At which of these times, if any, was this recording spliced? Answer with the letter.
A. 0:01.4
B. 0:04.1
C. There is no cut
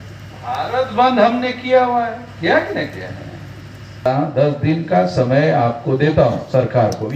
B